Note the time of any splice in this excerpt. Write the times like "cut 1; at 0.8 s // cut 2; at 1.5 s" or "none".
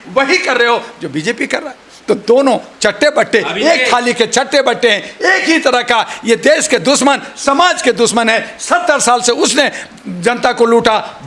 none